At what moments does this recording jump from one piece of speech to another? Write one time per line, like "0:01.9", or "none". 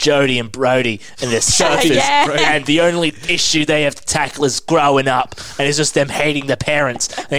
none